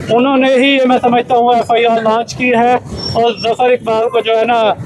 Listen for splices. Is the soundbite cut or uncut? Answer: uncut